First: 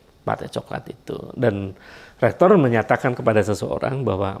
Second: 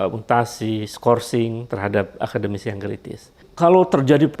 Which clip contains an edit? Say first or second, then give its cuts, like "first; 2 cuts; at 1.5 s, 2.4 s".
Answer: second; 1 cut; at 3.4 s